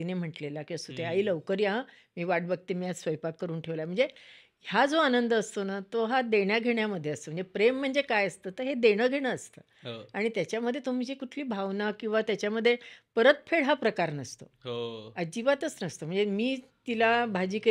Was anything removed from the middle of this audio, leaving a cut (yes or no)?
no